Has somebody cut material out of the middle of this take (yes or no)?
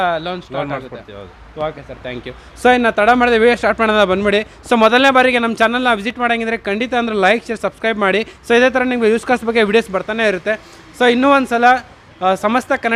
no